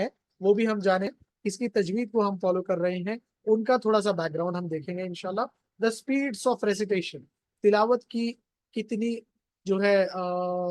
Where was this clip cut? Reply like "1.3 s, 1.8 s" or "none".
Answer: 1.1 s